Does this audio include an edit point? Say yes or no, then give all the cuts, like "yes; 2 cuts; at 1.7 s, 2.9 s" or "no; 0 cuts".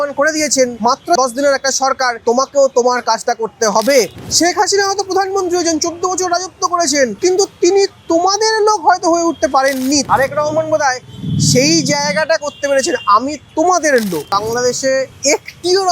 yes; 7 cuts; at 1.0 s, 2.2 s, 4.2 s, 7.1 s, 10.1 s, 13.4 s, 14.7 s